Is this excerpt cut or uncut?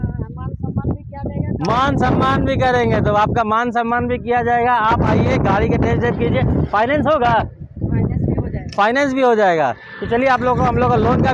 uncut